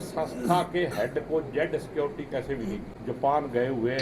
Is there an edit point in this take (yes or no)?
yes